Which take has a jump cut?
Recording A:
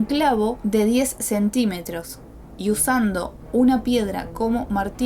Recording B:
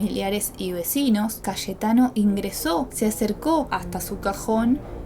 B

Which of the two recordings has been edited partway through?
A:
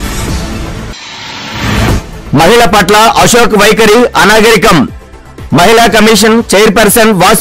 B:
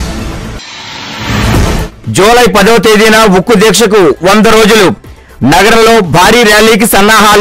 B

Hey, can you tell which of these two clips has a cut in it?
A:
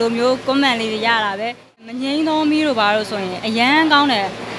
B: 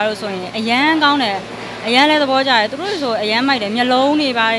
A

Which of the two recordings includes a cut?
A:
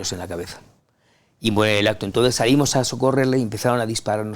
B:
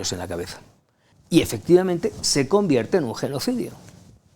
B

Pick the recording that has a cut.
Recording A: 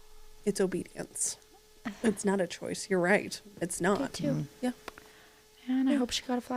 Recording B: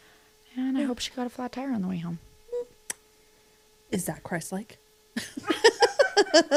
A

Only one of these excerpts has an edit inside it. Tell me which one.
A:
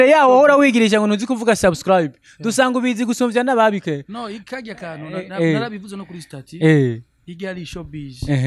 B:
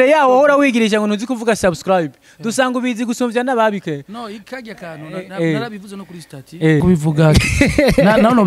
B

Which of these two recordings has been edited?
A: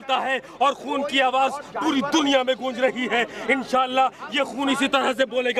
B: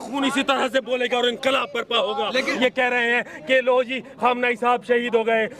B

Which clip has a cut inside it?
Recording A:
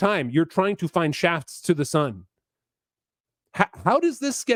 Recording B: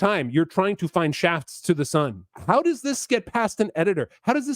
B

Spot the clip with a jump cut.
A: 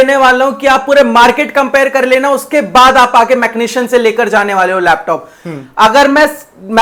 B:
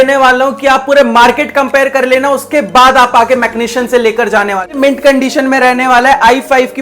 B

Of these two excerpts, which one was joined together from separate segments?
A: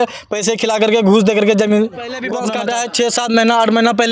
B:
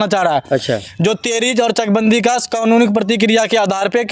A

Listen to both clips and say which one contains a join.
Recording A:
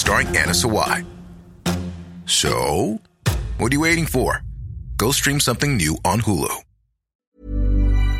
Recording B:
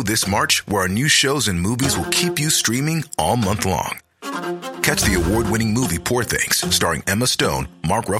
A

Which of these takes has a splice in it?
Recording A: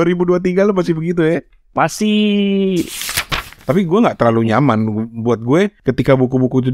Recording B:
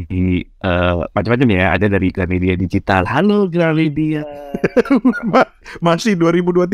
A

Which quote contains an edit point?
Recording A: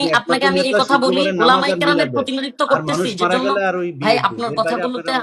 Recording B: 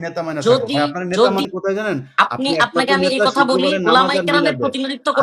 B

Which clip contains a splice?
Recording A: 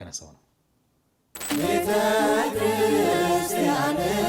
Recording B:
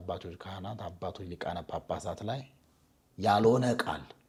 A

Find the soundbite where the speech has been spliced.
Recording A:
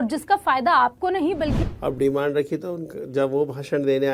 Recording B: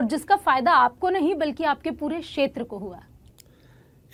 A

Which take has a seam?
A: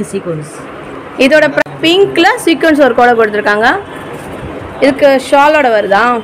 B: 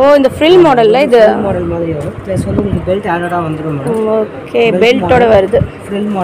A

